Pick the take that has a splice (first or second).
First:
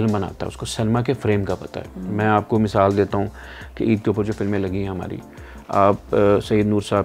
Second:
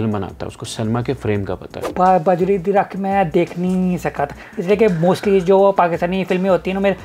second